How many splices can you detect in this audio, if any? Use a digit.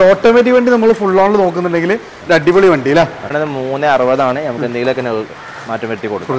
1